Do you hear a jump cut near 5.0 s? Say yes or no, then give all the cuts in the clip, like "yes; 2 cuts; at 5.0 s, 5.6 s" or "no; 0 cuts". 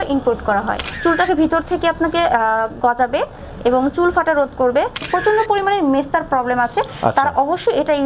yes; 2 cuts; at 0.9 s, 5.0 s